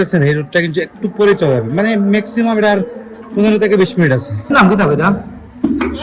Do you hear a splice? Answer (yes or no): yes